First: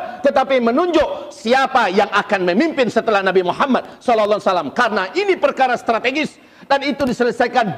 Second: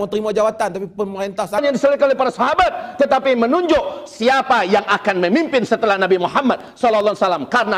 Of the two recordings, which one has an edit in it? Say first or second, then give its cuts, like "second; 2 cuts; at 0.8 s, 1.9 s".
second; 1 cut; at 1.6 s